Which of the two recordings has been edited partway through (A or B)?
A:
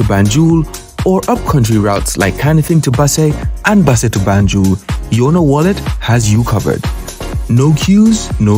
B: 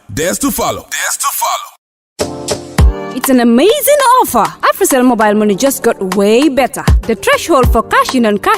B